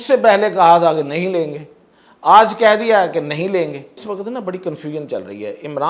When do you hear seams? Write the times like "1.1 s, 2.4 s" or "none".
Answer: 4.0 s